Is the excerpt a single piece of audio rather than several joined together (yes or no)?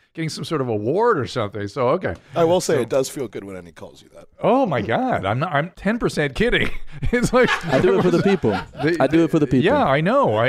no